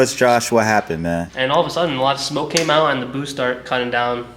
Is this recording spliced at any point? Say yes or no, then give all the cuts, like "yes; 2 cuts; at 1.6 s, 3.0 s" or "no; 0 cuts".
yes; 1 cut; at 1.3 s